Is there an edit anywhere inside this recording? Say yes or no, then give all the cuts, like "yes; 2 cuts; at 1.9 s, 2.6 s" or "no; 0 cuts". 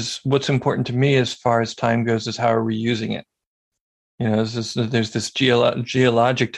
no; 0 cuts